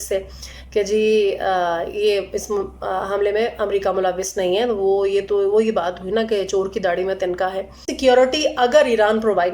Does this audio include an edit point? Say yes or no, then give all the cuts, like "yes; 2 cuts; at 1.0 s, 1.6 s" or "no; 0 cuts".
yes; 1 cut; at 7.9 s